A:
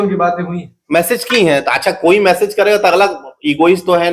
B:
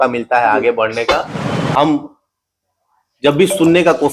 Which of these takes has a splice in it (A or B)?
B